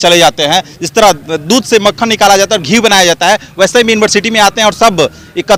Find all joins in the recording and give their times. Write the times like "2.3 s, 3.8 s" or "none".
none